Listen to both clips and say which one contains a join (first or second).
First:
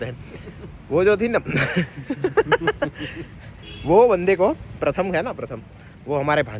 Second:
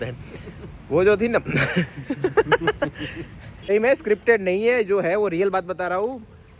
second